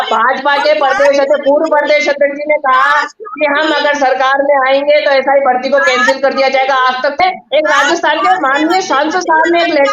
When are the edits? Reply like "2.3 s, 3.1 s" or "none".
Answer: 7.2 s